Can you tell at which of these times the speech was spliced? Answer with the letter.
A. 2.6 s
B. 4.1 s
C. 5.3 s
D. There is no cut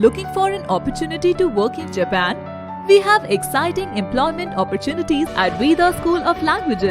C